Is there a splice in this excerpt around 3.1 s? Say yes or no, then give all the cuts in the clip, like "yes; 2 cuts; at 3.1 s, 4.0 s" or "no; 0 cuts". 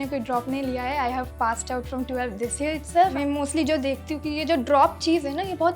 yes; 1 cut; at 3.1 s